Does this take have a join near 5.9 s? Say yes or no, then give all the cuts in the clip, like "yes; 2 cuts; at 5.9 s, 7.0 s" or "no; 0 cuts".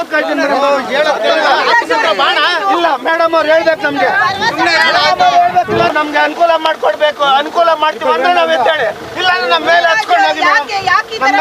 yes; 1 cut; at 5.9 s